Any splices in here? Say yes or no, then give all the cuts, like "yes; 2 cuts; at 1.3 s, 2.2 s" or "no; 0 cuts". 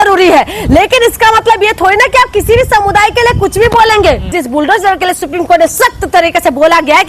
yes; 1 cut; at 4.3 s